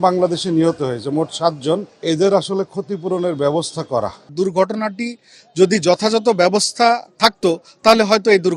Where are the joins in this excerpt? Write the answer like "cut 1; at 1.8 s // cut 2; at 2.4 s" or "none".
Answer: cut 1; at 1.9 s // cut 2; at 4.2 s